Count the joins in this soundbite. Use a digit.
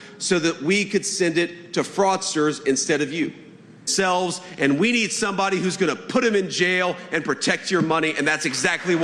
1